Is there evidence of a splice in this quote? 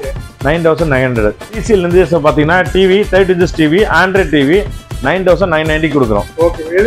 yes; 1 cut; at 1.5 s

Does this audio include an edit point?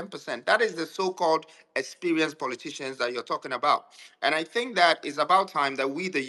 no; 0 cuts

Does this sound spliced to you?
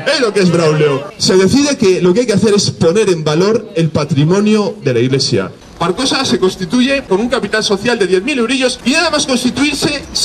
yes; 4 cuts; at 1.1 s, 5.6 s, 7.1 s, 8.7 s

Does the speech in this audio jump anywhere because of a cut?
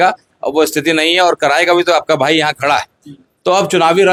no; 0 cuts

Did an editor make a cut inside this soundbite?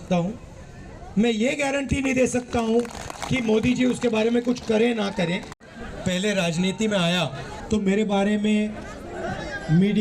yes; 1 cut; at 7.5 s

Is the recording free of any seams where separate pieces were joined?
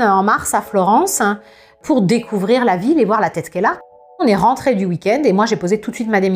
no; 1 cut; at 4.2 s

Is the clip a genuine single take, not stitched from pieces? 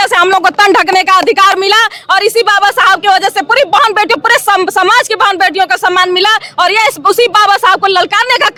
yes; 0 cuts

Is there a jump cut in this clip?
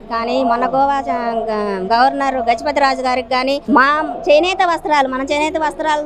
no; 0 cuts

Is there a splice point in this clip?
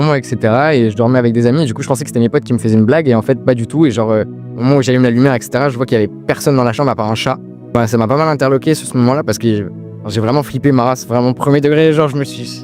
no; 0 cuts

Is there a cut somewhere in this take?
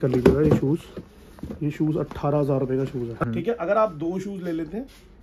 yes; 1 cut; at 3.3 s

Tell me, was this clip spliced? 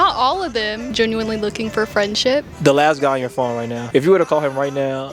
yes; 3 cuts; at 0.8 s, 2.5 s, 3.8 s

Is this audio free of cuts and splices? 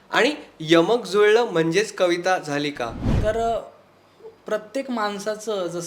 no; 1 cut; at 3.0 s

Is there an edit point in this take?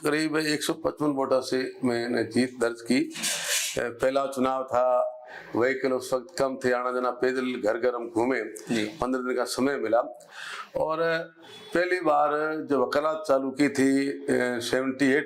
no; 0 cuts

